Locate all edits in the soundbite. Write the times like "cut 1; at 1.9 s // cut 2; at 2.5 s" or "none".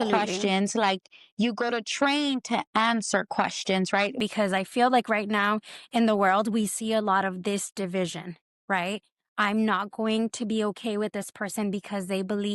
cut 1; at 4.2 s